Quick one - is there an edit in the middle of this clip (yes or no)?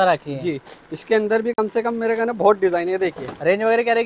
no